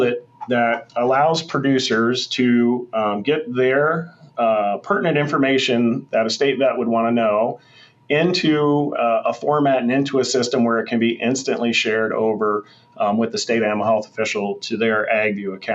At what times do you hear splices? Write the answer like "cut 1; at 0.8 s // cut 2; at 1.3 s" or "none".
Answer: none